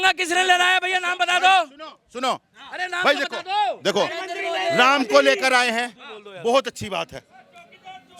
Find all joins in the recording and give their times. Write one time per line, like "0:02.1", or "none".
none